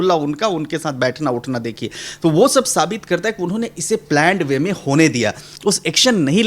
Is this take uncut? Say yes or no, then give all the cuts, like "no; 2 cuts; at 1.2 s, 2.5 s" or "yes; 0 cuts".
no; 1 cut; at 5.5 s